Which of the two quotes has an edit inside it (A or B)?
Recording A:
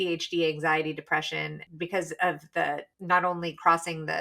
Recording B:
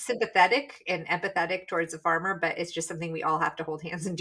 A